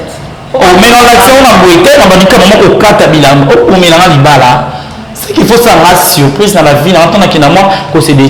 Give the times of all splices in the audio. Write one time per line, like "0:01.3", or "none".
none